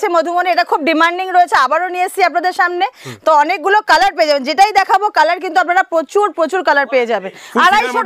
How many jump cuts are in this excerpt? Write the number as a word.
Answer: zero